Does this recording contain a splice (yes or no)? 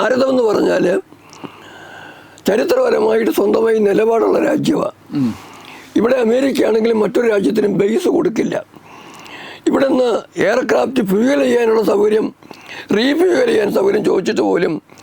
no